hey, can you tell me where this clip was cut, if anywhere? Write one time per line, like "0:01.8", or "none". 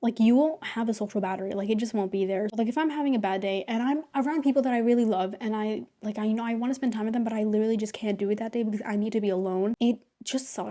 none